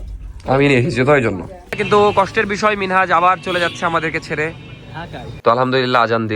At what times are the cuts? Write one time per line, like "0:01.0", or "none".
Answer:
0:01.7
0:05.4